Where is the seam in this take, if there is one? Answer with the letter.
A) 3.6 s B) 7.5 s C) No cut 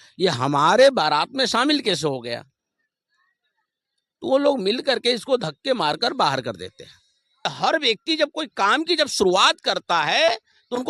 B